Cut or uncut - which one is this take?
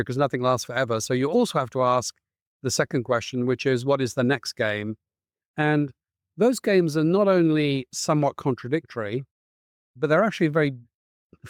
uncut